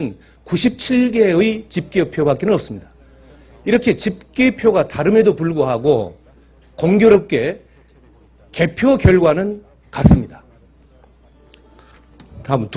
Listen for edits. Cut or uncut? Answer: uncut